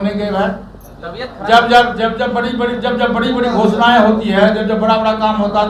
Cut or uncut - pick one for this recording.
uncut